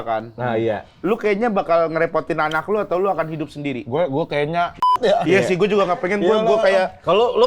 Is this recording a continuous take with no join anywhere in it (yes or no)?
no